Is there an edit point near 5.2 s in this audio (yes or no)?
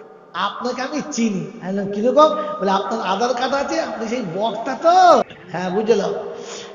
yes